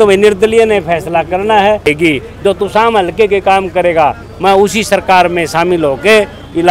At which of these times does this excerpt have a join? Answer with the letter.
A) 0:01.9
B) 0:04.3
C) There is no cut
A